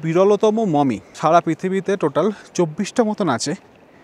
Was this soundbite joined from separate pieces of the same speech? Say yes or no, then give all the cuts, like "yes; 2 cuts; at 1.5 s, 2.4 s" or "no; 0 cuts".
yes; 1 cut; at 1.1 s